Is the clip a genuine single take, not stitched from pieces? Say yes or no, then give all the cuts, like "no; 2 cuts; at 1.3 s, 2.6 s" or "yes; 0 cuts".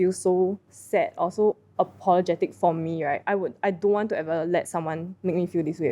yes; 0 cuts